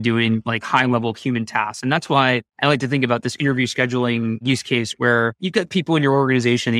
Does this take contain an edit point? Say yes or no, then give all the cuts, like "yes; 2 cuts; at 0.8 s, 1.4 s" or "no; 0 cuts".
yes; 3 cuts; at 2.5 s, 4.4 s, 5.4 s